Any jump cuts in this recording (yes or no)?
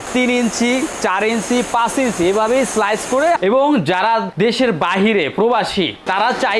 yes